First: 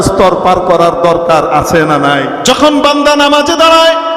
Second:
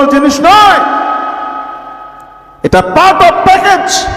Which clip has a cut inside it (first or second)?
first